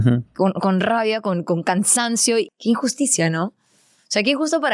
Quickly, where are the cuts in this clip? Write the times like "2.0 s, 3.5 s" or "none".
2.5 s